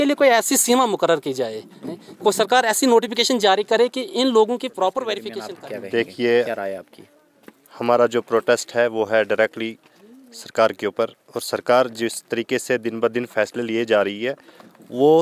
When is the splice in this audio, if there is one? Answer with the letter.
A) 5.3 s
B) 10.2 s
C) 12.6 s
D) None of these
A